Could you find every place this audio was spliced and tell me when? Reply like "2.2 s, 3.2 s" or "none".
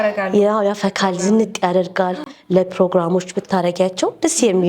none